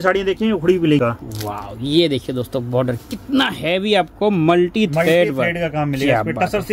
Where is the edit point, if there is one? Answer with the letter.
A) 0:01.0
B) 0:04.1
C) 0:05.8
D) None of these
A